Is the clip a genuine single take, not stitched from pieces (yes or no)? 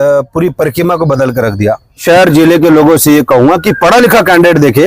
no